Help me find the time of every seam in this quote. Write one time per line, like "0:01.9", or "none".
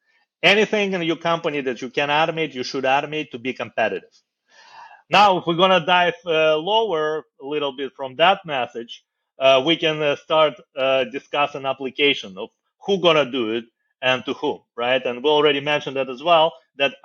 none